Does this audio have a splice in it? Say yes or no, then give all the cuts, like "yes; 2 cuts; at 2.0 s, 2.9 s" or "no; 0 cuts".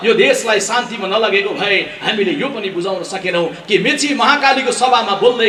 no; 0 cuts